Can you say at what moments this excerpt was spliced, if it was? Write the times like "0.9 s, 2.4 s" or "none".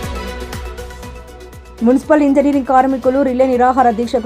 1.3 s